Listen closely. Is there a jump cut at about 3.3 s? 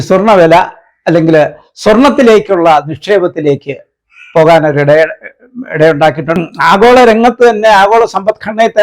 no; 1 cut; at 6.4 s

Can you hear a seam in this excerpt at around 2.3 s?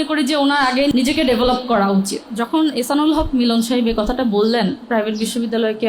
yes; 3 cuts; at 0.9 s, 2.3 s, 4.8 s

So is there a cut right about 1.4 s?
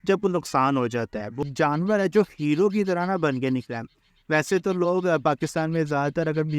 yes; 1 cut; at 1.4 s

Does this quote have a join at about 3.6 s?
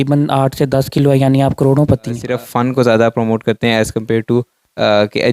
no; 1 cut; at 2.3 s

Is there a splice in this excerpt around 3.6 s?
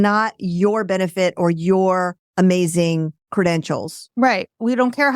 no; 1 cut; at 2.2 s

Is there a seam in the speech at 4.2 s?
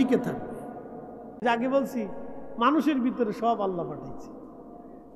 no; 1 cut; at 1.4 s

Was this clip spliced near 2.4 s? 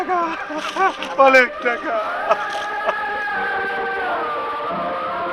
yes; 1 cut; at 2.4 s

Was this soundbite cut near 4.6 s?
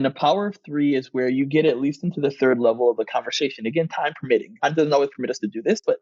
yes; 1 cut; at 4.6 s

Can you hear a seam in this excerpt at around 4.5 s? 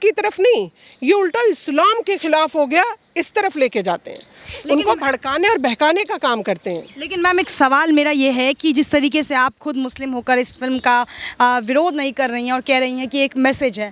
no; 0 cuts

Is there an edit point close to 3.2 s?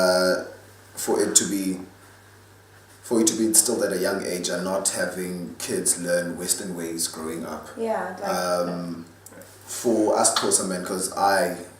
no; 1 cut; at 8.3 s

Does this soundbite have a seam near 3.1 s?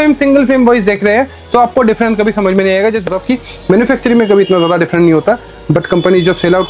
yes; 1 cut; at 3.1 s

